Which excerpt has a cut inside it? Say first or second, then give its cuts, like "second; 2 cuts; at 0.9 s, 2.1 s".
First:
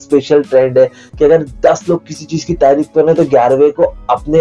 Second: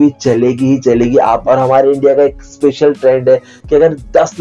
second; 1 cut; at 1.4 s